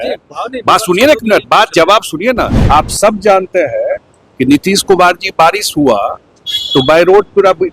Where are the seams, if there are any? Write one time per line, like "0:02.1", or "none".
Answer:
0:02.6